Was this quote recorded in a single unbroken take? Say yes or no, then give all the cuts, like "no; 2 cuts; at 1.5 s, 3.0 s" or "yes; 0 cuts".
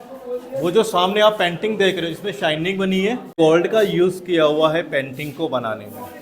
no; 1 cut; at 3.4 s